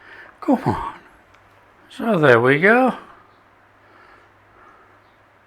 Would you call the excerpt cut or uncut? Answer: uncut